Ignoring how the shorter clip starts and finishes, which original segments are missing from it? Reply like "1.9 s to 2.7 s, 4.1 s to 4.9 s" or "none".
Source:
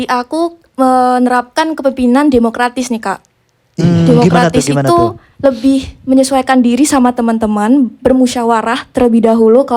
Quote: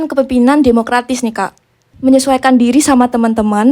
3.6 s to 5.9 s